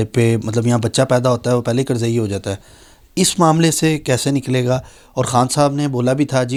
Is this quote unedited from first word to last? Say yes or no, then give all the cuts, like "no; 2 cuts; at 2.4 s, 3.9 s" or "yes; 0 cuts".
yes; 0 cuts